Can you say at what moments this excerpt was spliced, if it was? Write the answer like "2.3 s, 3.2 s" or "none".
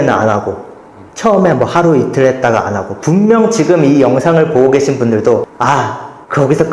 5.5 s

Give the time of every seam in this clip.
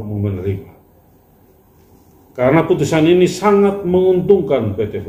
none

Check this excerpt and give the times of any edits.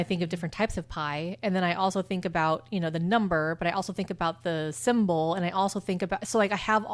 none

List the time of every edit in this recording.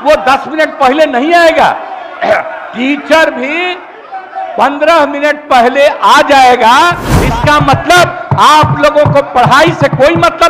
7.1 s

